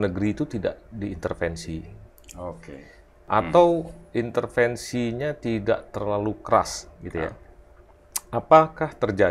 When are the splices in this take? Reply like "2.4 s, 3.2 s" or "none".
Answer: 3.2 s